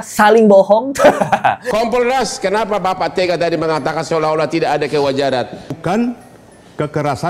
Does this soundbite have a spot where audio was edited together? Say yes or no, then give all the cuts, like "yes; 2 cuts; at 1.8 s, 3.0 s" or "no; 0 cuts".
yes; 2 cuts; at 1.6 s, 5.8 s